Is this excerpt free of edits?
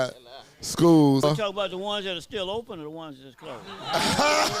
no; 1 cut; at 1.2 s

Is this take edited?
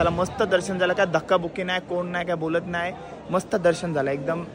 no; 0 cuts

